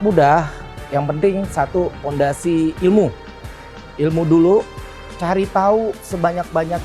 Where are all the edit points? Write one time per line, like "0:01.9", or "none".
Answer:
none